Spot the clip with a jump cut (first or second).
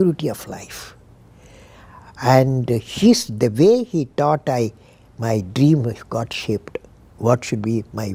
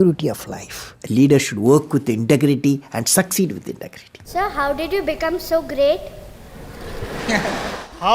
second